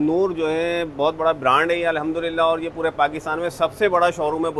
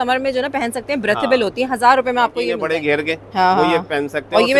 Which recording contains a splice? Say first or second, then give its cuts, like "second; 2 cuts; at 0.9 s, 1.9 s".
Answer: second; 1 cut; at 2.6 s